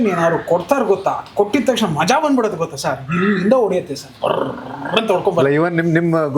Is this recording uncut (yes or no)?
yes